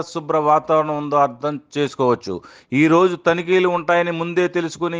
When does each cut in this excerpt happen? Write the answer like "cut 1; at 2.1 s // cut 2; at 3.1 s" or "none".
none